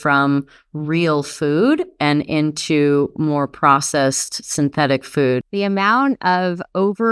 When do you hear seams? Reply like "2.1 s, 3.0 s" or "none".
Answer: 5.4 s